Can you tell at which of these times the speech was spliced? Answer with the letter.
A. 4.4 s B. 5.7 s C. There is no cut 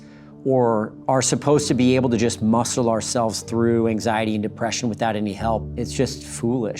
B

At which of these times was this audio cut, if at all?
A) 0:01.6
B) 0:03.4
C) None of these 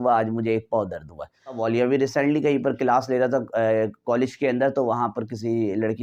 A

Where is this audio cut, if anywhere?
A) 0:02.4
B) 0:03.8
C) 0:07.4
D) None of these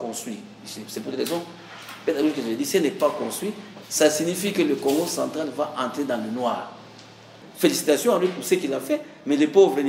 C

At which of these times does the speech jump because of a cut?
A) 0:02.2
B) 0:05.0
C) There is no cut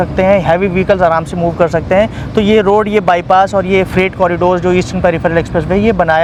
C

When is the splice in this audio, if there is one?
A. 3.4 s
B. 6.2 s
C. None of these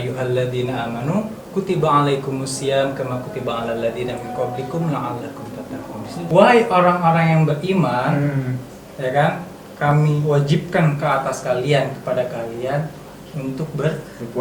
B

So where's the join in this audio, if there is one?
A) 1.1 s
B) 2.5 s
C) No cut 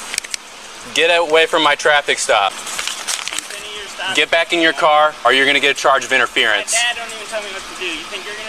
B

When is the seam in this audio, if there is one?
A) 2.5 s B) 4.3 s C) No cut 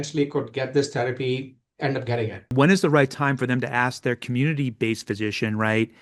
A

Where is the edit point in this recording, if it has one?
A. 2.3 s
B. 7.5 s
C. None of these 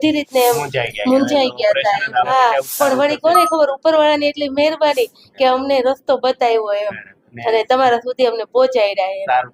A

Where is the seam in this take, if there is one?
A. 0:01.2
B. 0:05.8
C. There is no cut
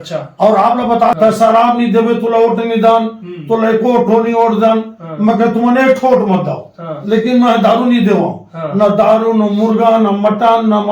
A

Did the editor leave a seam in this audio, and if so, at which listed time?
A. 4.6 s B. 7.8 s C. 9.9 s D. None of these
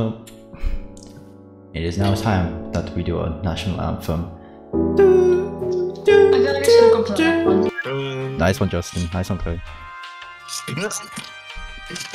D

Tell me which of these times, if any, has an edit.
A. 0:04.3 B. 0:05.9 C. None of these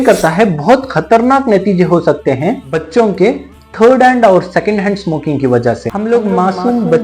B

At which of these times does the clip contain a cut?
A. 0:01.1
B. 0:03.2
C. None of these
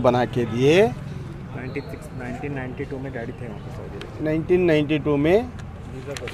C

